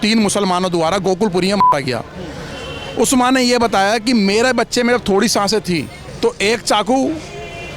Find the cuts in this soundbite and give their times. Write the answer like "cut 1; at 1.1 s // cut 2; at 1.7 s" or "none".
cut 1; at 6.0 s